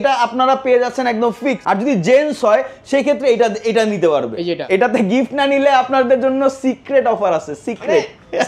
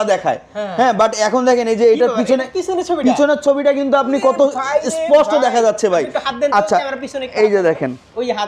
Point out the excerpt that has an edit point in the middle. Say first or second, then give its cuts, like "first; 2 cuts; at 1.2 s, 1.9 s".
first; 2 cuts; at 1.6 s, 4.6 s